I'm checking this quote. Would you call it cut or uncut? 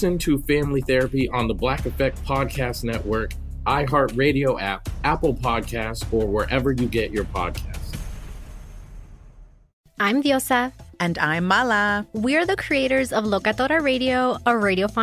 cut